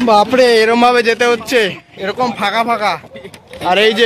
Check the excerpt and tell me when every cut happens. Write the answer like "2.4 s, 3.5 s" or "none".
none